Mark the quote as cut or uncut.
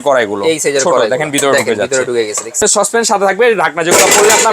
cut